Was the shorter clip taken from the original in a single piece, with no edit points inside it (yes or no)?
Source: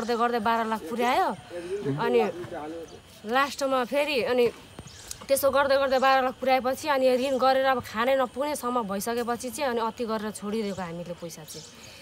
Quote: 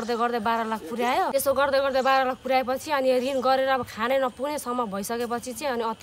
no